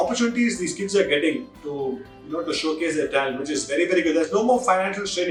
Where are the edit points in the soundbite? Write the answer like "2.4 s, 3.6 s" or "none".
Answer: none